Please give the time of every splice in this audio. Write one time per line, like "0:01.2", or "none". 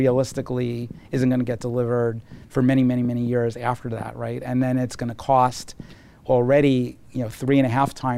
none